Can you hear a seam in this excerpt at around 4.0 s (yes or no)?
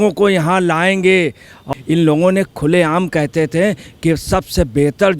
no